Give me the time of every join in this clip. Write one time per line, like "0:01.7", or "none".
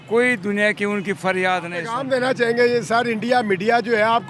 0:01.8